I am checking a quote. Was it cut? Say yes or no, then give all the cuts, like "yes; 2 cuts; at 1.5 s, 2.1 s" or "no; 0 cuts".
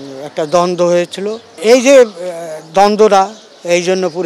yes; 1 cut; at 1.5 s